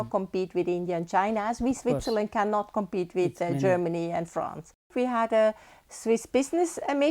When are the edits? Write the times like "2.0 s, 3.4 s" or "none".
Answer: 4.9 s